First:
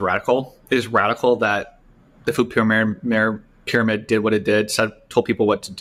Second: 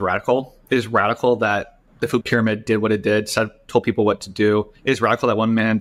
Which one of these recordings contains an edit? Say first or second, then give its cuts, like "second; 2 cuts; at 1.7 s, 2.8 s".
second; 2 cuts; at 2.1 s, 4.7 s